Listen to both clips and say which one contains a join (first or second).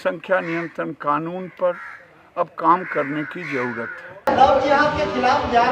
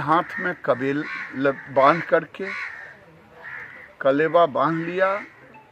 first